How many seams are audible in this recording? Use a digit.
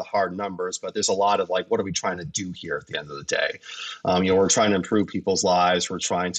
0